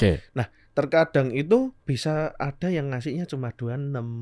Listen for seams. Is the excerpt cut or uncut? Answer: cut